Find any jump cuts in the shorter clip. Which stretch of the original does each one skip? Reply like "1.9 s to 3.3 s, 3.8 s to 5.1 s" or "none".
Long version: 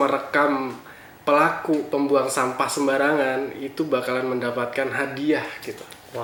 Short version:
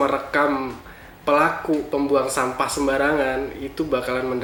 none